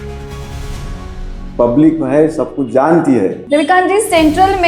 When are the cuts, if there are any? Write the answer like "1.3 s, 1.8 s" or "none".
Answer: 3.4 s